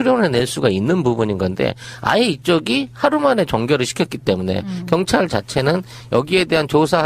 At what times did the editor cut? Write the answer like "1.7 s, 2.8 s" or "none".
5.1 s